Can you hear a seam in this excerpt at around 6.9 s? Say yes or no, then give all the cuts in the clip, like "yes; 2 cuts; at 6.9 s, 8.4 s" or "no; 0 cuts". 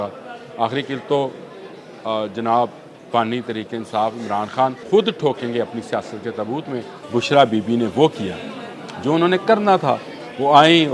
yes; 2 cuts; at 4.8 s, 6.9 s